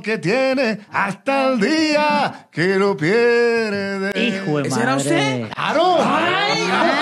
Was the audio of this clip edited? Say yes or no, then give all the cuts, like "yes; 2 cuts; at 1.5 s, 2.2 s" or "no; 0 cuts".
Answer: no; 0 cuts